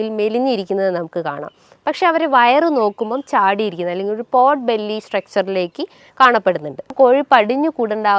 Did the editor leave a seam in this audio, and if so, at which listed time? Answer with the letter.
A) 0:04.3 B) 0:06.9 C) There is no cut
B